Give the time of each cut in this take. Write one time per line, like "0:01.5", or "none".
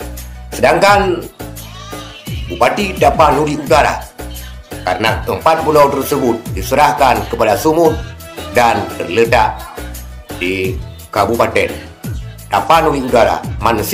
none